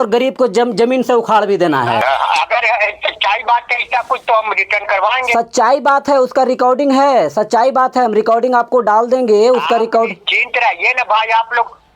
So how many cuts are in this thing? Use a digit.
1